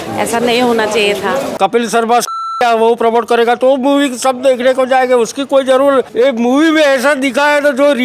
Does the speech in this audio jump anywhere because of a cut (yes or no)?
yes